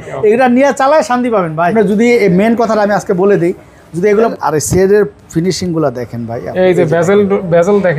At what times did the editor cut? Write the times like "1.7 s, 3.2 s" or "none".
1.7 s, 4.3 s